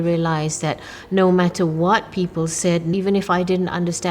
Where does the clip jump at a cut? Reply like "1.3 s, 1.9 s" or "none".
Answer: 2.9 s